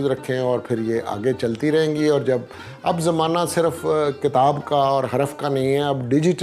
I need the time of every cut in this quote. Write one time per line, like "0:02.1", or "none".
none